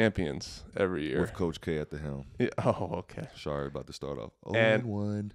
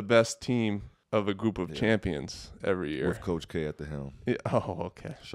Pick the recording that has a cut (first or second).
second